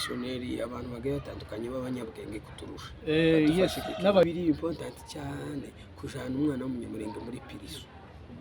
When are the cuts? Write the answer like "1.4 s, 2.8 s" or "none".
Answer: 4.2 s